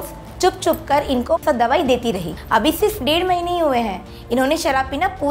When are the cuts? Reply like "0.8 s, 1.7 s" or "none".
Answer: 1.4 s, 2.3 s